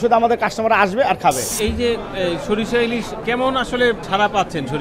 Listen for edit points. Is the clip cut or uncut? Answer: cut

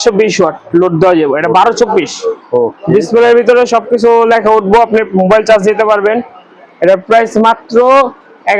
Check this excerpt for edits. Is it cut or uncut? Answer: uncut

